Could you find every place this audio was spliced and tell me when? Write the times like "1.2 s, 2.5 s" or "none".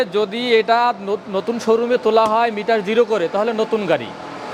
none